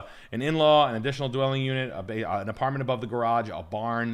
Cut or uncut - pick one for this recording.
uncut